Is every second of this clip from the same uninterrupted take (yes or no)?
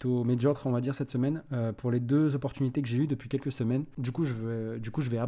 yes